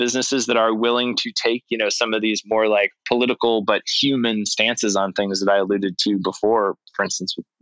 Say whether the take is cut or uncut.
uncut